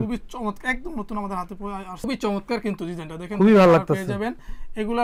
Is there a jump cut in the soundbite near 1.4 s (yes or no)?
no